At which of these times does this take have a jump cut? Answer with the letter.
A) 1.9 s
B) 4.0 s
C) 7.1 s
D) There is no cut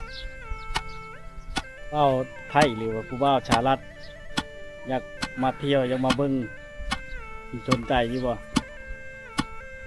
A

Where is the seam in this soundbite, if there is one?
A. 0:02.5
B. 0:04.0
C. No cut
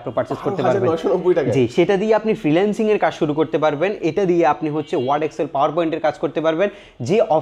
C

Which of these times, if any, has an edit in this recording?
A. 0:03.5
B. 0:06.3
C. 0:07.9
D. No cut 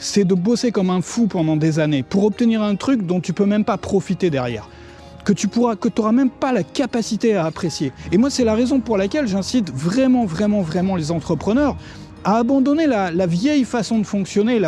C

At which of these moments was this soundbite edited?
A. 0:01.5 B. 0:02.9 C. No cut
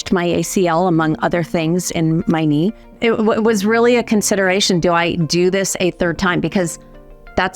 B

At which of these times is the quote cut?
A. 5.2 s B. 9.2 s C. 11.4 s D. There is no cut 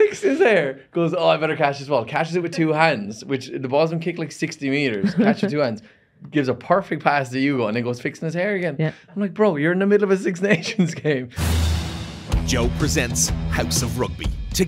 C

